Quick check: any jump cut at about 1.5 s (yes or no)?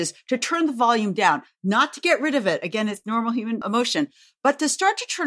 no